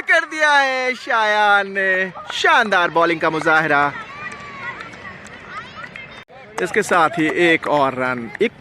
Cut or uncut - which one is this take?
cut